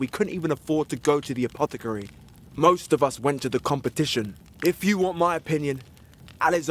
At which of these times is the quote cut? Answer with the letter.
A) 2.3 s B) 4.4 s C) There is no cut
B